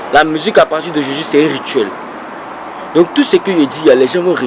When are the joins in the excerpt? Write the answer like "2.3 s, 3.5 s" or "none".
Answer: none